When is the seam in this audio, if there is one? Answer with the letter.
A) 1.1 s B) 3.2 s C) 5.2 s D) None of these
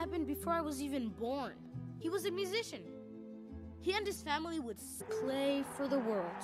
D